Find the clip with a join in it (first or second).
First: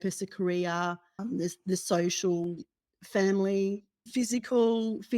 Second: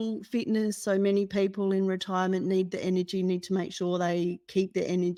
first